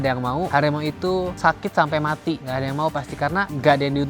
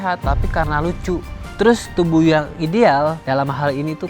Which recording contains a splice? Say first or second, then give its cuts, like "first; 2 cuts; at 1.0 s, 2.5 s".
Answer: second; 1 cut; at 1.4 s